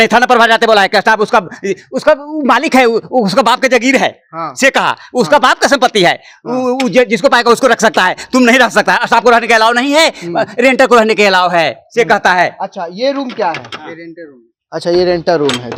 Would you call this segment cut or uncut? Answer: uncut